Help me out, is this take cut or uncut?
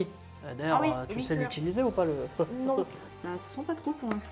cut